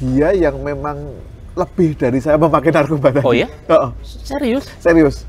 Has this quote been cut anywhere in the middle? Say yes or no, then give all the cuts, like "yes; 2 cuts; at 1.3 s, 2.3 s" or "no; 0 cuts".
no; 0 cuts